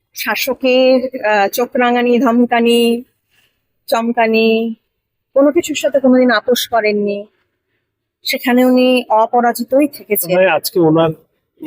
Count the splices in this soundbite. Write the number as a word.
one